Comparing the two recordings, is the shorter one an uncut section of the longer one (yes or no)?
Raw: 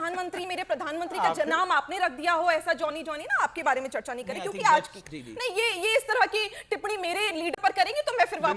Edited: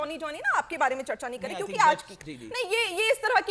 yes